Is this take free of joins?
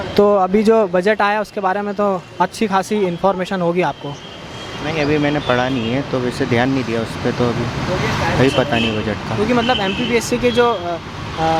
yes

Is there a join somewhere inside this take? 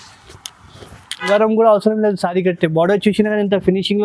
yes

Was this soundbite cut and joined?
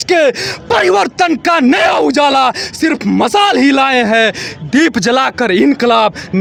no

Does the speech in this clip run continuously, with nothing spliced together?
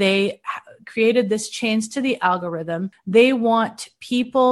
no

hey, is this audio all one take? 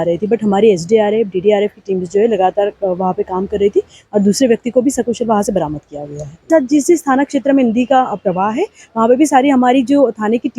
no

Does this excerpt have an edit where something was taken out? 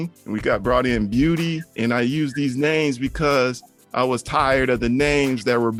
no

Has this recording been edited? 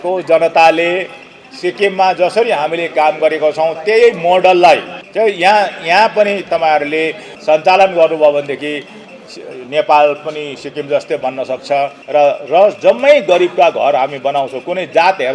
yes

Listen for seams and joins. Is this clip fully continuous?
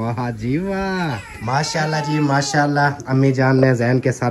no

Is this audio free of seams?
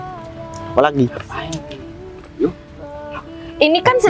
yes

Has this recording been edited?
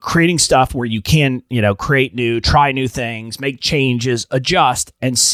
no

